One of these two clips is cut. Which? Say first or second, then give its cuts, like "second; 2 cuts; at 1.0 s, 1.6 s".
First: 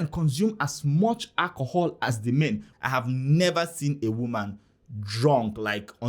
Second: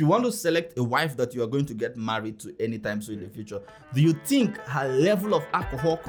first; 1 cut; at 2.7 s